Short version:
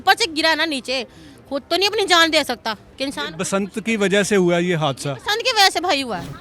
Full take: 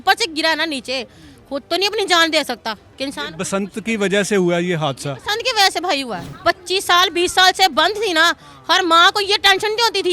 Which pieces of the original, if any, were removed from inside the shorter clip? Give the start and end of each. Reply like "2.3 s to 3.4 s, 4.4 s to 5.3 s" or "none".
none